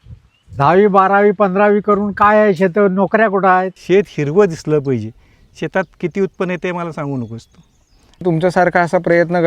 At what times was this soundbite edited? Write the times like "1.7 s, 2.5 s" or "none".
3.8 s, 8.2 s